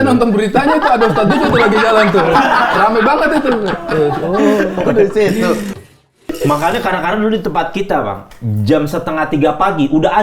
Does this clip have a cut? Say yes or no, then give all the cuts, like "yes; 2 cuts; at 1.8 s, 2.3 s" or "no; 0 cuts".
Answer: yes; 1 cut; at 5.9 s